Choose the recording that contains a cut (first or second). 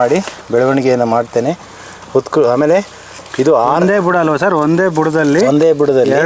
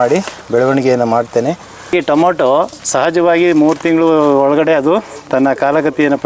second